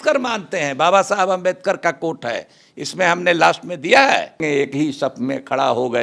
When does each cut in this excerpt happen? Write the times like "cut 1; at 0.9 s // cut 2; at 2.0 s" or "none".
cut 1; at 4.4 s